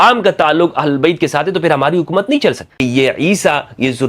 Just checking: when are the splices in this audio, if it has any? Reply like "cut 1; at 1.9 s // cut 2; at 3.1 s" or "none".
cut 1; at 2.7 s